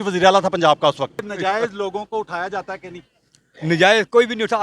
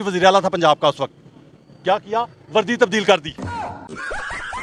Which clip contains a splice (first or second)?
first